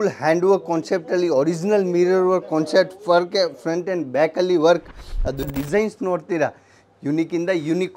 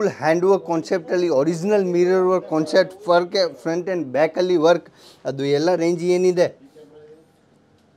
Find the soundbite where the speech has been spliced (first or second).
first